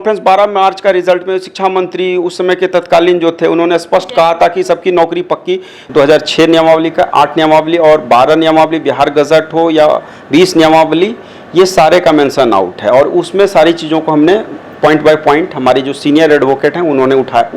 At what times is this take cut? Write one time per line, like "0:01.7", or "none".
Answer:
0:05.8